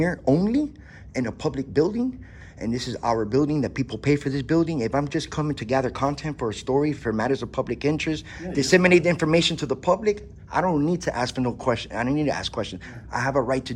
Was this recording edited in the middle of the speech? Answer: no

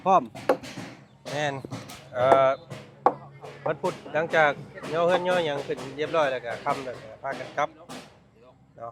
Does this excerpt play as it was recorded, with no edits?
yes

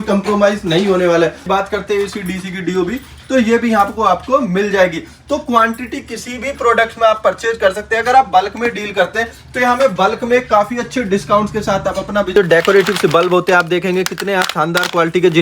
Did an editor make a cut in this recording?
yes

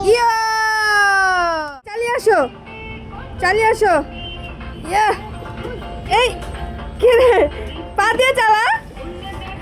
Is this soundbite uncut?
no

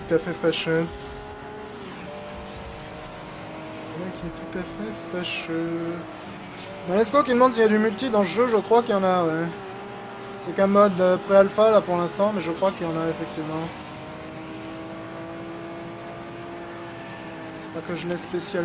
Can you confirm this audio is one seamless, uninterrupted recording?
no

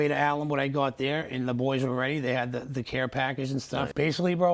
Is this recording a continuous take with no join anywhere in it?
yes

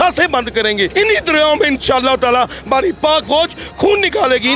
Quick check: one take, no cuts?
no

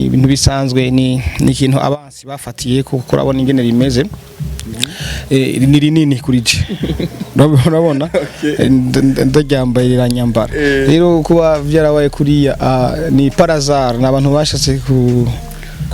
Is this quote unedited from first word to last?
yes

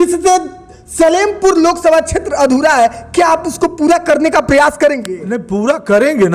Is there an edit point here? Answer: no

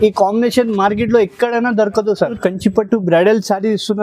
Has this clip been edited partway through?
yes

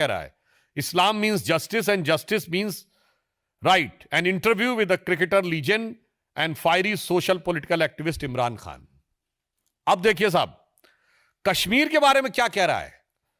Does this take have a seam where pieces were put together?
no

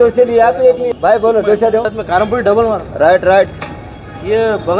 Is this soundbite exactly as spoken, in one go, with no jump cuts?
no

